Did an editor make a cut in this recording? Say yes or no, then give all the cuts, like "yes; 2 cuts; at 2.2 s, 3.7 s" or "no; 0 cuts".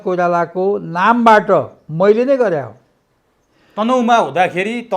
no; 0 cuts